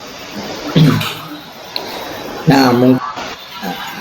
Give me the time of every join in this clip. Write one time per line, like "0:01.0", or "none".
0:03.0